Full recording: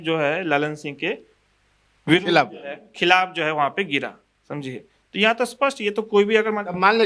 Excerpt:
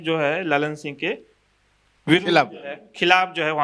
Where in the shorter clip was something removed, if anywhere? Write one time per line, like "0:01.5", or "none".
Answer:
none